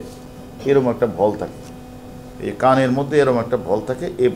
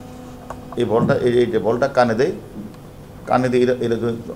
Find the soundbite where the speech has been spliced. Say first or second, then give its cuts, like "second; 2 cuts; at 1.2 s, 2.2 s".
first; 1 cut; at 2.3 s